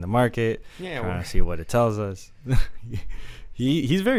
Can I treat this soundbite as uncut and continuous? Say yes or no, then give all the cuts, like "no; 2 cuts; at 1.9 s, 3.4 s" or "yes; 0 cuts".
yes; 0 cuts